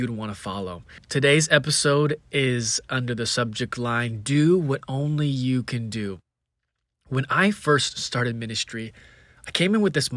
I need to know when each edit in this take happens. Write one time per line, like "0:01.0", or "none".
0:01.0

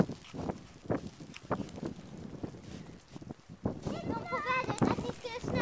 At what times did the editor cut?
0:04.2

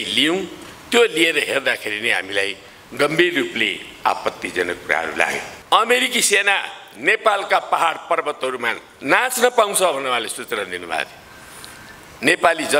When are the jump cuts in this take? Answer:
0:05.5

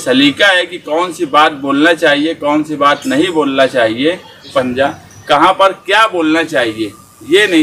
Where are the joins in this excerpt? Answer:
0:04.7

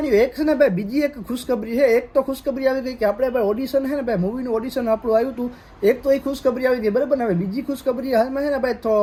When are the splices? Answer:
none

